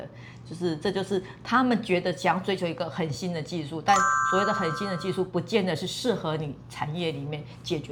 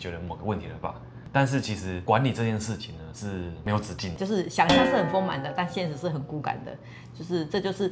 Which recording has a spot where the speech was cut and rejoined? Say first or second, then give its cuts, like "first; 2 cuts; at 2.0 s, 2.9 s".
second; 2 cuts; at 1.2 s, 4.1 s